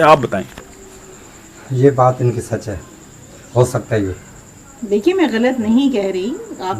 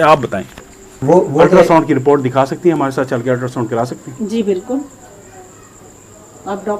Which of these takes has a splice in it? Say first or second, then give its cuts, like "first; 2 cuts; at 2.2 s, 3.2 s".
second; 1 cut; at 1.0 s